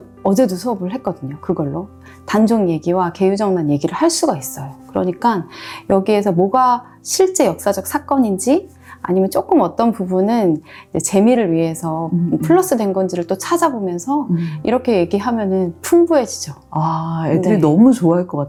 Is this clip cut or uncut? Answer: uncut